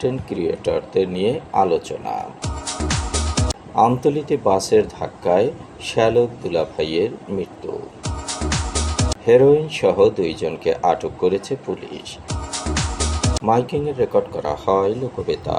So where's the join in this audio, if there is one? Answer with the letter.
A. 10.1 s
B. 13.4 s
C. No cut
C